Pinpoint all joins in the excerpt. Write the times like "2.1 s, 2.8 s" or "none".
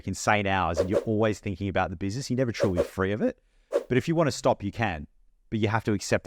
none